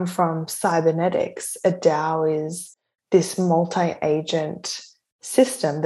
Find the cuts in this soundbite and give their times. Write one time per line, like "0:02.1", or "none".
none